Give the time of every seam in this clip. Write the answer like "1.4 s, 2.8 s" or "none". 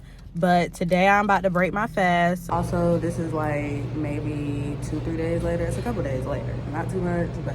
2.4 s

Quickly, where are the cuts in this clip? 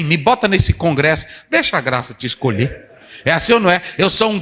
none

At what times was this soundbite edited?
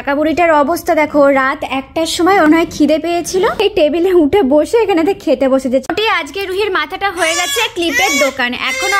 2.5 s, 3.6 s, 5.9 s

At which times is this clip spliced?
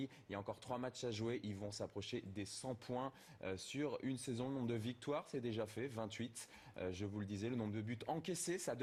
none

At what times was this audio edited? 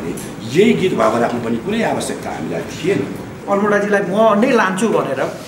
3.3 s

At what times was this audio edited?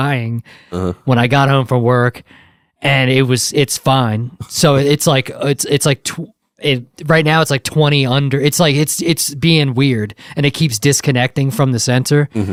none

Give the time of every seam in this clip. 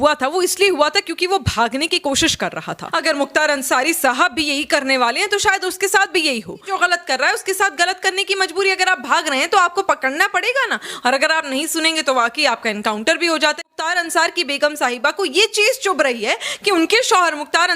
2.8 s, 6.7 s, 13.7 s

